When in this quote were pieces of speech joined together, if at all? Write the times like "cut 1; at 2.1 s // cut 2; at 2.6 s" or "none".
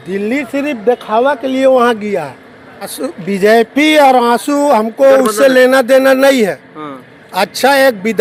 none